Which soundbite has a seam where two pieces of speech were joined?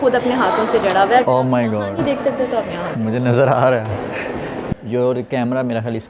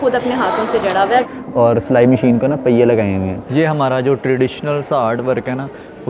second; 2 cuts; at 1.3 s, 3.4 s

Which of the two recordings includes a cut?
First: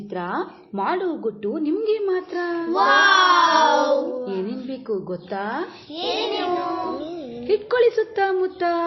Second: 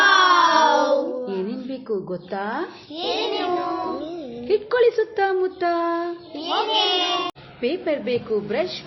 second; 1 cut; at 7.4 s

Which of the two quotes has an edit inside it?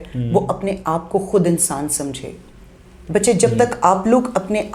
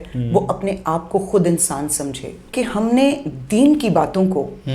second; 1 cut; at 2.5 s

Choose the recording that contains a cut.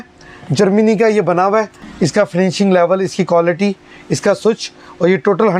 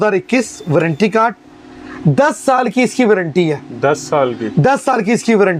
first; 1 cut; at 1.8 s

